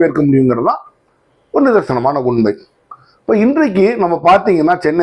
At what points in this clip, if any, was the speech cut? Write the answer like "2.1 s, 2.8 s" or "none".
none